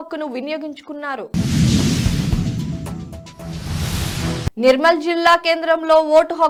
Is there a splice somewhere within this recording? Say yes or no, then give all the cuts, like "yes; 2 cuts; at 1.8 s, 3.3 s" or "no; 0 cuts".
no; 0 cuts